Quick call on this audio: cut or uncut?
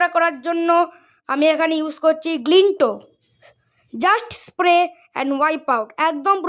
uncut